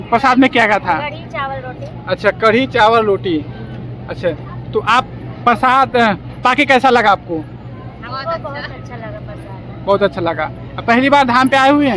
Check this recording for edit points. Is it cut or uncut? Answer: uncut